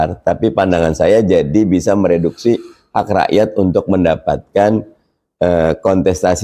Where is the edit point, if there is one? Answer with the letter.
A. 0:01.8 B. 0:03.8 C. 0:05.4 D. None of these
D